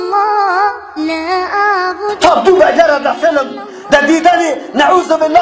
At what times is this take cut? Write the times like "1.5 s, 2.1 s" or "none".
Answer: 2.1 s